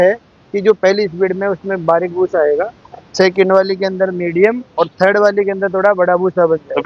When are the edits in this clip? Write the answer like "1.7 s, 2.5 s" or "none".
none